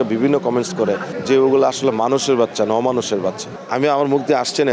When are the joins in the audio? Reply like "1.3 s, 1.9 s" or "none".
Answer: 3.6 s